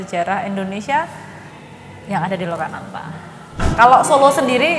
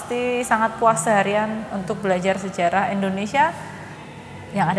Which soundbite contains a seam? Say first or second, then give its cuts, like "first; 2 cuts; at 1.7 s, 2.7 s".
first; 1 cut; at 3.6 s